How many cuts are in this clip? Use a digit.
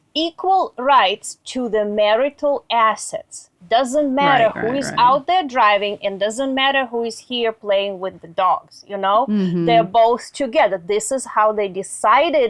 0